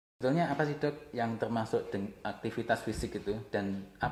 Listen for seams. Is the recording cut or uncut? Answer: uncut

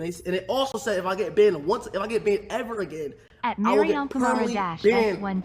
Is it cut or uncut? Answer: uncut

